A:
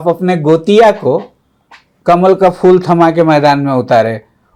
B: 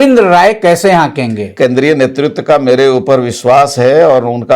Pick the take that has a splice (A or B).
B